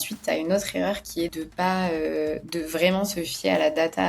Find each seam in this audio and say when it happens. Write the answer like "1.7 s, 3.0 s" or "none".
1.4 s